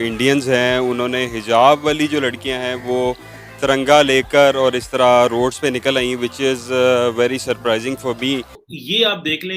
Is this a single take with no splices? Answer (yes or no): no